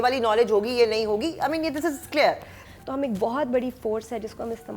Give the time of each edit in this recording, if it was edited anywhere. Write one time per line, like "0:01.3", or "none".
0:02.5